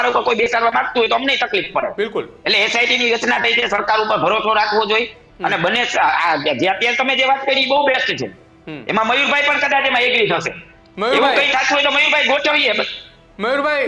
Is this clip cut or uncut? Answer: uncut